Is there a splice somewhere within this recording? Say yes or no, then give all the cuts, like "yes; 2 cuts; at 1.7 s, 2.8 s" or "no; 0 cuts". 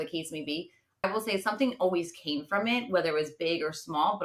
yes; 1 cut; at 1.0 s